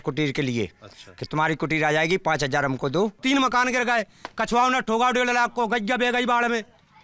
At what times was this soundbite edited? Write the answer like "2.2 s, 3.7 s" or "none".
3.2 s